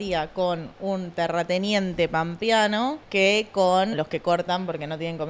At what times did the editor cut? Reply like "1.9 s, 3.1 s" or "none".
3.0 s, 3.9 s